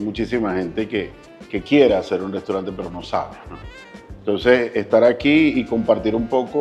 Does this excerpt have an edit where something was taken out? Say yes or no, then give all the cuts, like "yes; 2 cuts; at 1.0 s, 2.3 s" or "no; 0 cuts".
no; 0 cuts